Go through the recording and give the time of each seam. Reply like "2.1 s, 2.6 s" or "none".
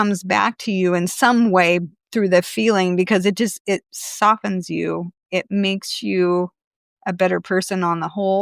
none